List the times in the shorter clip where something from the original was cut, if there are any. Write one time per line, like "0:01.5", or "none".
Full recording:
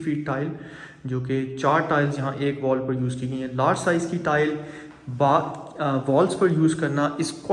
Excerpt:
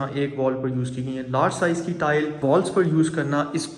0:02.4